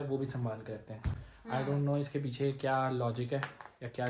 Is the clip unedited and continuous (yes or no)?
yes